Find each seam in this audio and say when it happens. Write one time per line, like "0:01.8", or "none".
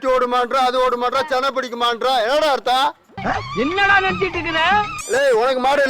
0:05.0